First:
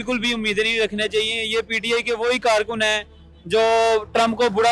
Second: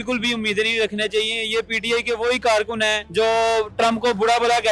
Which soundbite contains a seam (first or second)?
second